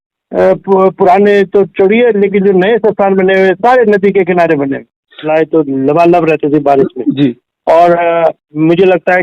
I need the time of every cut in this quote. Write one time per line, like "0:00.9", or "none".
0:05.3